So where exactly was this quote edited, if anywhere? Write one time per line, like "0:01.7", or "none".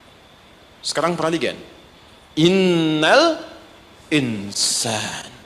none